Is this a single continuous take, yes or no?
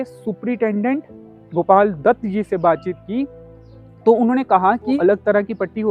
no